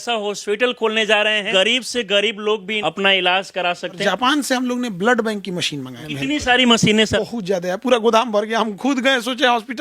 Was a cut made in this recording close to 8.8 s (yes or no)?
no